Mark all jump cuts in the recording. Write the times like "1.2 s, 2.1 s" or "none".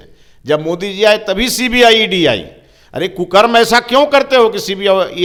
none

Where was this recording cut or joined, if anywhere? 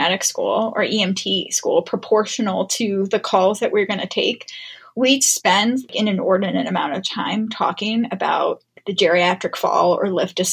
none

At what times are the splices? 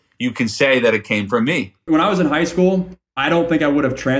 1.8 s

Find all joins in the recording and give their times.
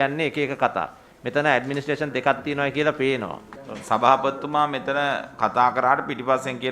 3.5 s

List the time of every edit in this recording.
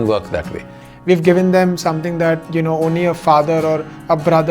1.0 s

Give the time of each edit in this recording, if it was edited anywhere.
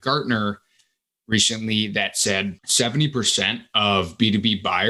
2.6 s

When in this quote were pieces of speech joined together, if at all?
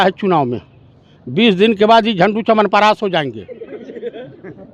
none

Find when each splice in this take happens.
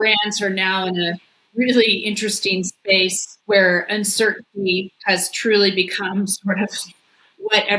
3.3 s, 4.9 s

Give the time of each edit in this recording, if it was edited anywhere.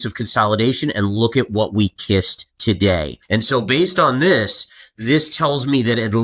2.4 s, 3.2 s

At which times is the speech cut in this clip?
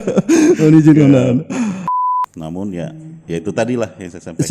1.9 s

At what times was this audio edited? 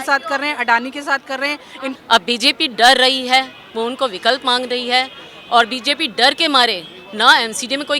1.8 s

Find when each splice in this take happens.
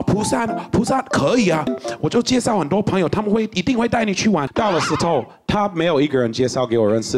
1.8 s, 4.5 s

